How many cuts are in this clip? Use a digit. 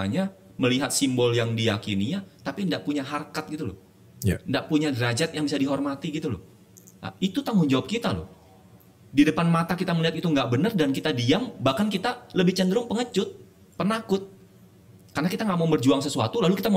0